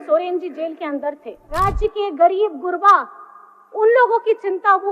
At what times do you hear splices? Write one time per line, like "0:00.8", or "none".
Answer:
0:01.5